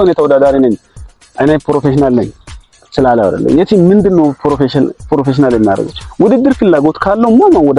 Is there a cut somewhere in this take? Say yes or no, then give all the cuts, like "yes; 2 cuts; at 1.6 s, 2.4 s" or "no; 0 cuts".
no; 0 cuts